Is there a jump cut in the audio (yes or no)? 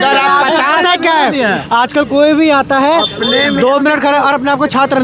no